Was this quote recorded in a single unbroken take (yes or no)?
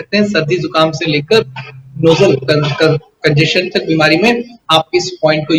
yes